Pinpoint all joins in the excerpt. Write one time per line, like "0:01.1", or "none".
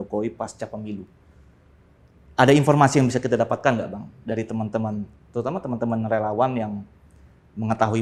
none